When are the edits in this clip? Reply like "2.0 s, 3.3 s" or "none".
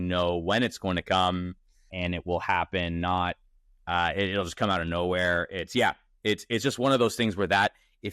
1.9 s, 3.7 s

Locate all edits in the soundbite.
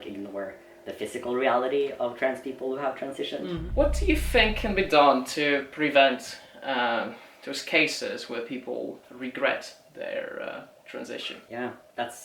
3.6 s, 11.4 s

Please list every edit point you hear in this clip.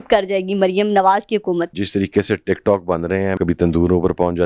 1.8 s, 3.3 s

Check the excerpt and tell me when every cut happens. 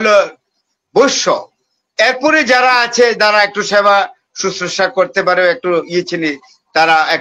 none

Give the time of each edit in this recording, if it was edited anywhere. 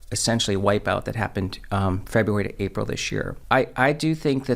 3.4 s

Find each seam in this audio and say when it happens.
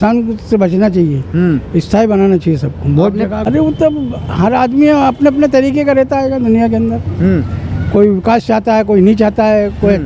3.4 s

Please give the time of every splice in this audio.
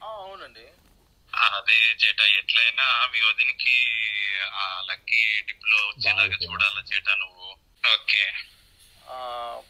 7.7 s

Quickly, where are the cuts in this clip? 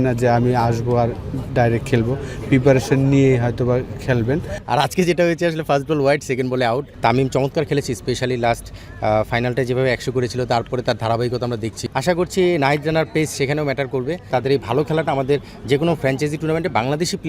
4.5 s, 6.9 s, 11.8 s, 14.3 s

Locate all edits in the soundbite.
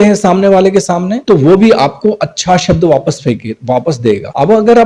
none

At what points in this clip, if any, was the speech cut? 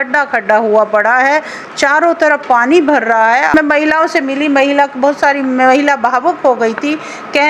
3.5 s

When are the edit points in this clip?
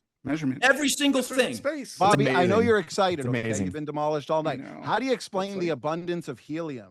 1.6 s

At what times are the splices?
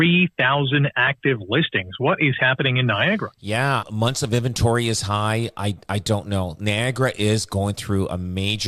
3.9 s

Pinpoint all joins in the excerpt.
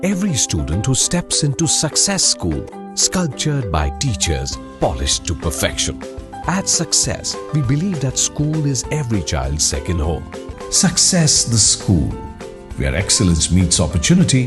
10.5 s

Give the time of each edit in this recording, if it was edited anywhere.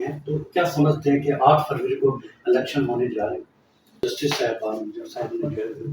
4.0 s

